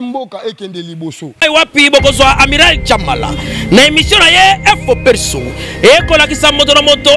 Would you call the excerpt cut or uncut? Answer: cut